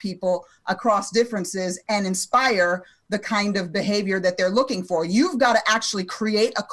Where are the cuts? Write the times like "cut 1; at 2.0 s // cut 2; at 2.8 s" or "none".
none